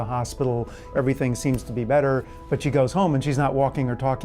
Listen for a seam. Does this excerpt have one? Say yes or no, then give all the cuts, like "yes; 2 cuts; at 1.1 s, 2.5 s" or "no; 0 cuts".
yes; 2 cuts; at 0.9 s, 2.4 s